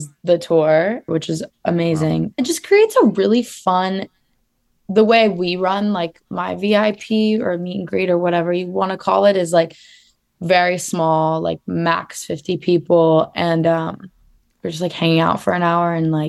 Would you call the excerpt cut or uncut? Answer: cut